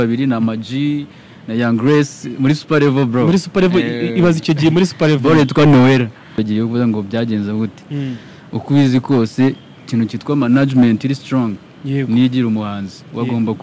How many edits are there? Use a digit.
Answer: 1